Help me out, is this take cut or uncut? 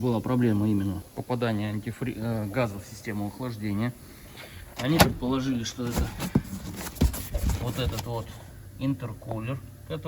cut